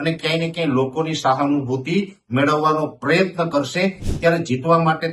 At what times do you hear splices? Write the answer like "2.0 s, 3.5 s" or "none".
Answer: 4.1 s